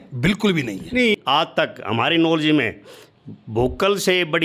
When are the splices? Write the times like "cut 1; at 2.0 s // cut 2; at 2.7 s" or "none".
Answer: cut 1; at 1.2 s